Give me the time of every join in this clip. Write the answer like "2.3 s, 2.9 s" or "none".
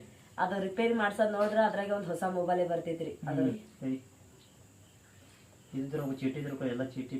3.6 s